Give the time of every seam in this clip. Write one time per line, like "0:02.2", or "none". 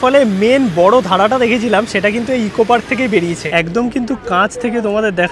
0:03.5